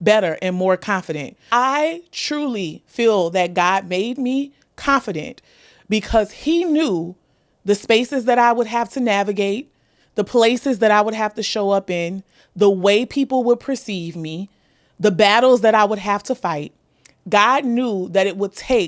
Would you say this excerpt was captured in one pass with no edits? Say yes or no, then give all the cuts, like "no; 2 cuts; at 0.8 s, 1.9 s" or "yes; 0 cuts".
no; 1 cut; at 1.4 s